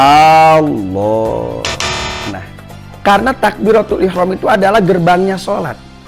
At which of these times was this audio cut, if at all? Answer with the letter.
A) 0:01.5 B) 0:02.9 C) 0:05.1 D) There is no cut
B